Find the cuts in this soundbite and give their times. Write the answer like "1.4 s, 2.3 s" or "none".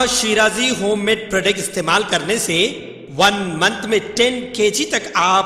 none

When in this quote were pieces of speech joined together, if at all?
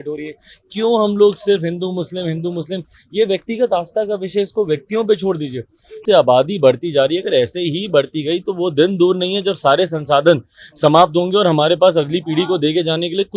6.0 s

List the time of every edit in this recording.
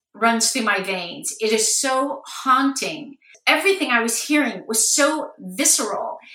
3.3 s

